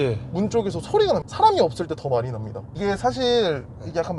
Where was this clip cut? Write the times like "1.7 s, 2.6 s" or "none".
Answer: 1.3 s, 2.7 s

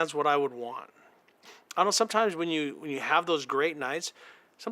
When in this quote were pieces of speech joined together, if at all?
1.3 s

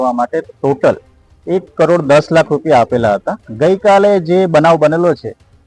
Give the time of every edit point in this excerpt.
3.4 s

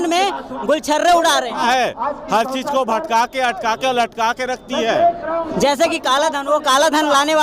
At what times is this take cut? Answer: 1.6 s, 5.5 s

